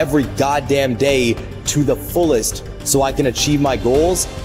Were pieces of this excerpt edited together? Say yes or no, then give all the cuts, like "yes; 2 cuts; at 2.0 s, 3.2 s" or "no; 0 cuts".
no; 0 cuts